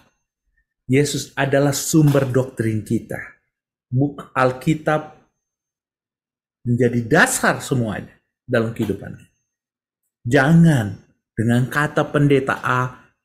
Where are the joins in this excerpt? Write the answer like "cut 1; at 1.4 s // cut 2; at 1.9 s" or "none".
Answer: none